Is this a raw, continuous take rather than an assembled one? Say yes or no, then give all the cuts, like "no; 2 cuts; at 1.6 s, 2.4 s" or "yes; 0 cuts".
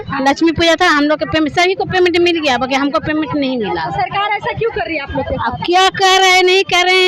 yes; 0 cuts